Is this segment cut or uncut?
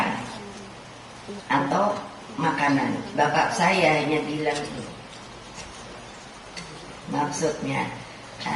uncut